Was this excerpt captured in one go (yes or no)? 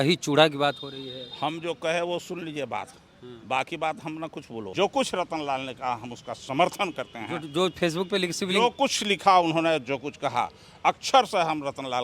no